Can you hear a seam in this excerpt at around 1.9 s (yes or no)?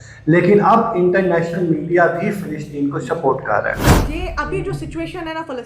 no